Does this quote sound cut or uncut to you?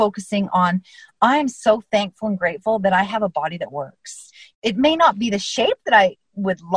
uncut